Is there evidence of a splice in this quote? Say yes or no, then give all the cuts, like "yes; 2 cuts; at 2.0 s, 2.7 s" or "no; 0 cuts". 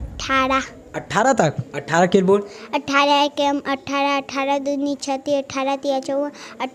no; 0 cuts